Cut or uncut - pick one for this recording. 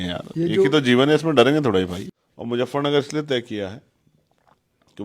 cut